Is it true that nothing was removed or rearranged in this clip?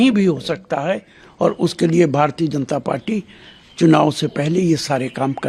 yes; 0 cuts

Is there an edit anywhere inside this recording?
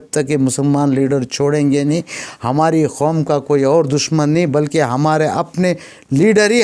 no; 0 cuts

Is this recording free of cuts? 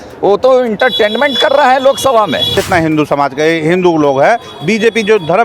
no; 1 cut; at 2.6 s

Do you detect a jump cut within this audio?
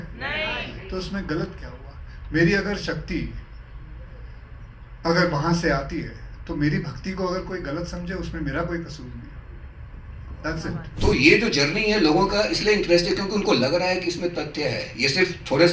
yes; 1 cut; at 10.9 s

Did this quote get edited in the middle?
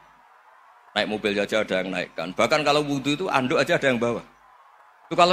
no; 0 cuts

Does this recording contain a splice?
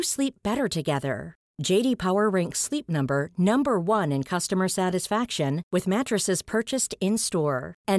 no; 0 cuts

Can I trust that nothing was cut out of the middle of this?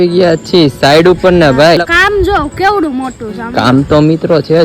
no; 1 cut; at 1.8 s

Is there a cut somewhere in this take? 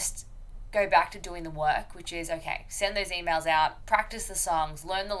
yes; 1 cut; at 3.8 s

